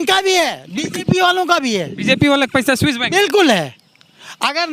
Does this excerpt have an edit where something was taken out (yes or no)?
no